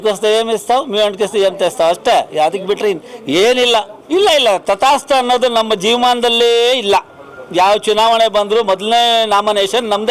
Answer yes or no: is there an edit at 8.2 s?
no